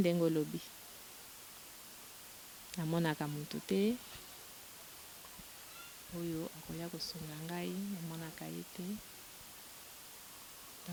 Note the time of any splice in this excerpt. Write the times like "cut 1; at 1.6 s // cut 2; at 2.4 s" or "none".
none

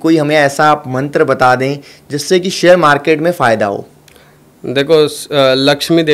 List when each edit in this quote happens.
none

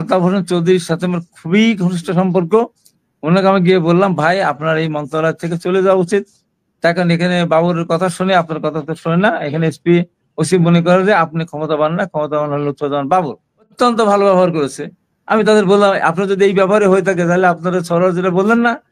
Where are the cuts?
cut 1; at 13.7 s

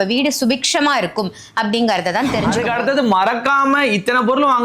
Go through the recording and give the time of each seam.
cut 1; at 2.6 s

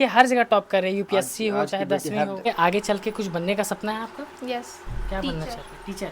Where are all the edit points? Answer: cut 1; at 2.5 s

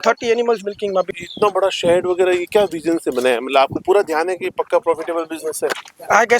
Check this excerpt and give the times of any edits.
cut 1; at 1.1 s

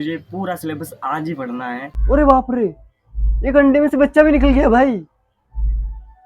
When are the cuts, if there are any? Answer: cut 1; at 1.9 s

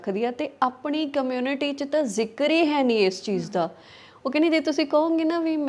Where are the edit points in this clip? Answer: none

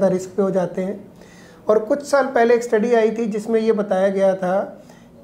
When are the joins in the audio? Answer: none

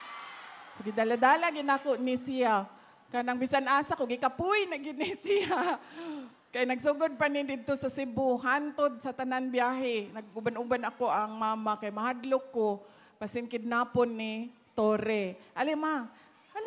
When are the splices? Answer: none

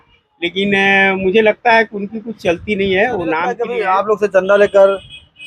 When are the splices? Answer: cut 1; at 3.6 s

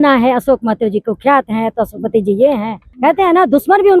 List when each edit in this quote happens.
cut 1; at 2.9 s

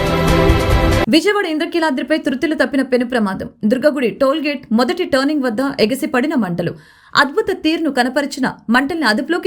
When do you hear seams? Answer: none

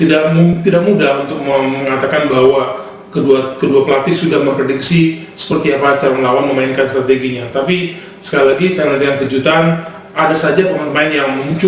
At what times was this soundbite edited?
cut 1; at 9.4 s

